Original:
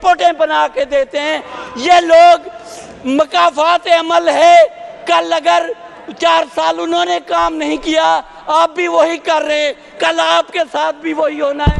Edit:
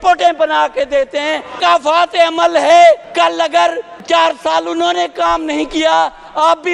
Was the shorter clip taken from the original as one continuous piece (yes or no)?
no